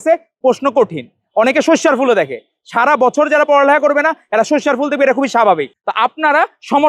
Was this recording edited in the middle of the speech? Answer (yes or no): yes